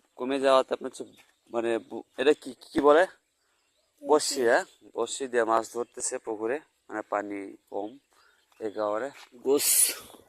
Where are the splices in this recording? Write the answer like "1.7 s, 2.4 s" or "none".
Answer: 9.3 s